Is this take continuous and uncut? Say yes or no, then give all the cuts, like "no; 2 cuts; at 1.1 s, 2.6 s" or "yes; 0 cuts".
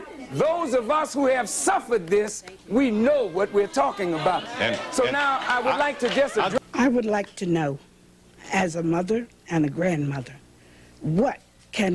no; 1 cut; at 6.6 s